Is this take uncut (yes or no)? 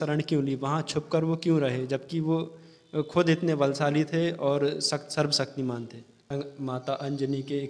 no